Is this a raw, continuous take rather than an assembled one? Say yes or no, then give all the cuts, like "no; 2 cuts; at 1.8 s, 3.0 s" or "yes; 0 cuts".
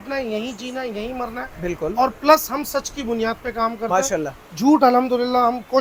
yes; 0 cuts